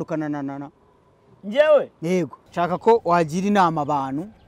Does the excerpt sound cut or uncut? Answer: cut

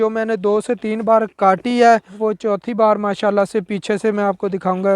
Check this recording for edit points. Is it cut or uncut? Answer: cut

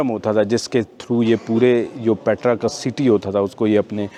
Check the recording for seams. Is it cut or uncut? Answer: uncut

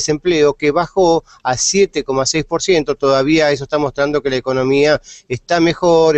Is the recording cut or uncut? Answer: cut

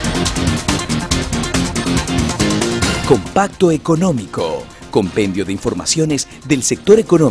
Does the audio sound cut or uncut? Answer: cut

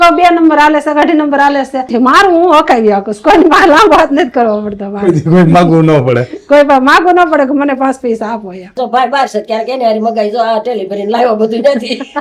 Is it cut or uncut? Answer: cut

